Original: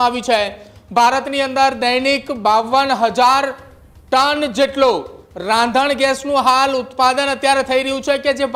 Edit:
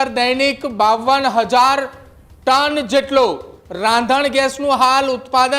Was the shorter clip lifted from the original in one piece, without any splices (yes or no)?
yes